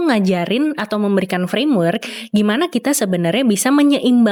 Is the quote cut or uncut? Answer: uncut